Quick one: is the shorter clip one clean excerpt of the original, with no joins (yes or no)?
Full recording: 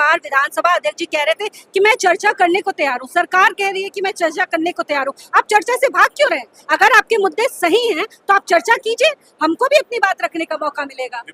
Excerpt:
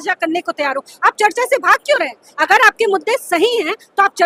yes